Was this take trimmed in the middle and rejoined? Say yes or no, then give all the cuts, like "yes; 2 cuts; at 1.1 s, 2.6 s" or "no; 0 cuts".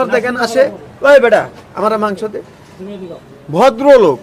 no; 0 cuts